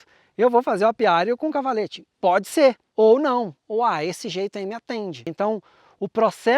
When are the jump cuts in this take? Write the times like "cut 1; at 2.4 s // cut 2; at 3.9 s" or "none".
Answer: cut 1; at 2.8 s // cut 2; at 5.3 s